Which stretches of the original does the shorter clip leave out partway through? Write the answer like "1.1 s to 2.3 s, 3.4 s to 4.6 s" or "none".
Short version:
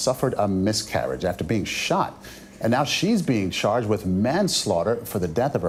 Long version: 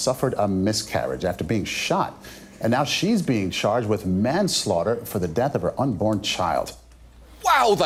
none